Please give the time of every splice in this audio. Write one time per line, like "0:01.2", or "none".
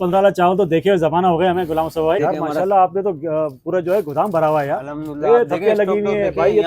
0:02.2